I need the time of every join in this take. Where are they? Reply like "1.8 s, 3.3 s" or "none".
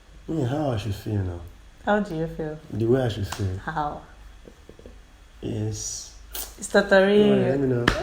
none